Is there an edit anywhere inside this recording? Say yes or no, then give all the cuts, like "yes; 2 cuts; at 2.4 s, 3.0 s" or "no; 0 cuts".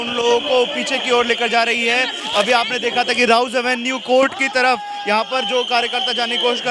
no; 0 cuts